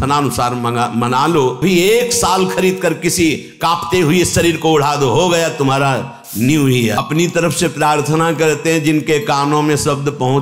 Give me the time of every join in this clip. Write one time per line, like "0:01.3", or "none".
0:01.6
0:07.0